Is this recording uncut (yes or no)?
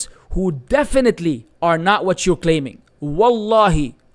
yes